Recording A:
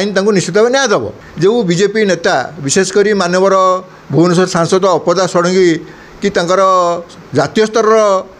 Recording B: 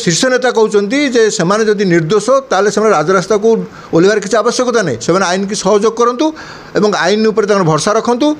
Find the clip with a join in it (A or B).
A